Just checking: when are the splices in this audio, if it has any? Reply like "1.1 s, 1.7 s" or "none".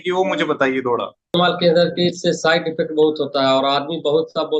1.4 s